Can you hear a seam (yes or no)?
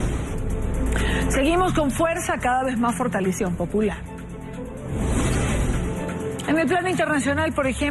no